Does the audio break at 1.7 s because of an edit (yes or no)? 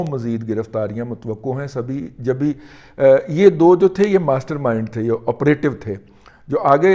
no